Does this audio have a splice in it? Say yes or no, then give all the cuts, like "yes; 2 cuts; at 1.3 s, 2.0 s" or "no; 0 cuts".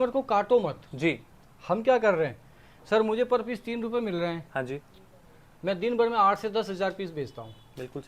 no; 0 cuts